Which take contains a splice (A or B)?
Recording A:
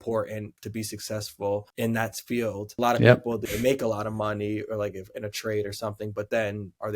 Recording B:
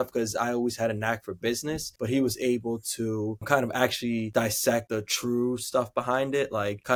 A